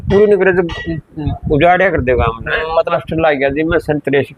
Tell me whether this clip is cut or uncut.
cut